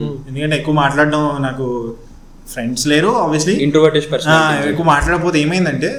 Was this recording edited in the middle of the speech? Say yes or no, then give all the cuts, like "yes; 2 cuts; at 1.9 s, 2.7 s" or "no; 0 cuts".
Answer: no; 0 cuts